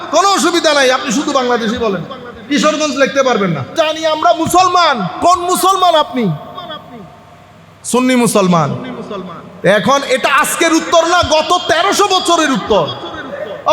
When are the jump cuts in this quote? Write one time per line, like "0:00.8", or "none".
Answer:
0:03.7